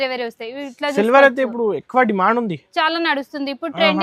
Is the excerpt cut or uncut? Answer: uncut